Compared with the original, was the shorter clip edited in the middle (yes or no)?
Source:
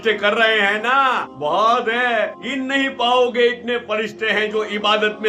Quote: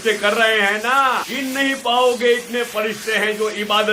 yes